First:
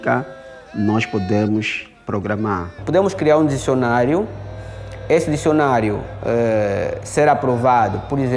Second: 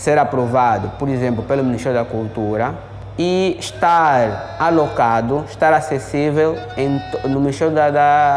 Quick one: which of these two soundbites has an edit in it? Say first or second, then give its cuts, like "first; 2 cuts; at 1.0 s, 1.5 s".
first; 1 cut; at 2.8 s